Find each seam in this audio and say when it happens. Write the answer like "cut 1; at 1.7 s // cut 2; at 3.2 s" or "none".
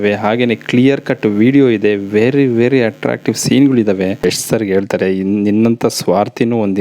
cut 1; at 4.2 s